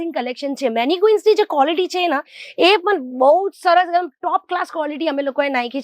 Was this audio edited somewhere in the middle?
no; 0 cuts

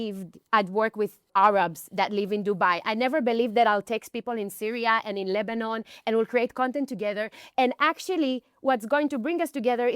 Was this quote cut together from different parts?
yes; 1 cut; at 1.3 s

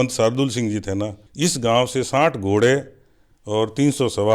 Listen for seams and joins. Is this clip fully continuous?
no; 1 cut; at 1.2 s

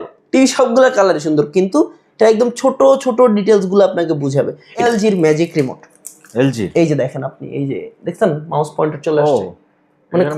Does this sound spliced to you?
yes; 1 cut; at 4.8 s

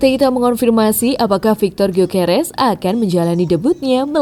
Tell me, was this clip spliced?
no; 0 cuts

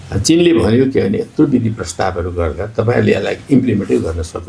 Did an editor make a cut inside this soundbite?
no; 0 cuts

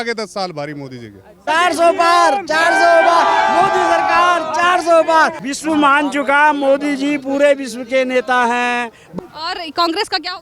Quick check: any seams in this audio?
yes; 3 cuts; at 1.4 s, 5.4 s, 9.1 s

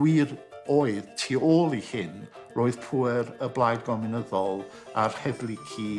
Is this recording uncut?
yes; 0 cuts

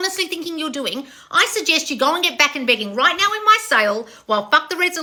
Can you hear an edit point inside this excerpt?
no; 0 cuts

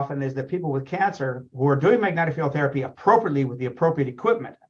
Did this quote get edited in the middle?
no; 0 cuts

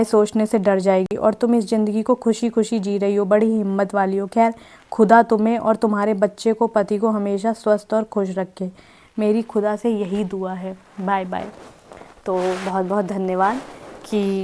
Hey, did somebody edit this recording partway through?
no; 0 cuts

